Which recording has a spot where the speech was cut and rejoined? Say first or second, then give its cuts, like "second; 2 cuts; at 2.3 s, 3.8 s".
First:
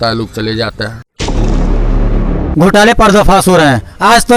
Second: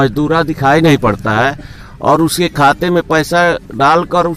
first; 2 cuts; at 1.2 s, 2.5 s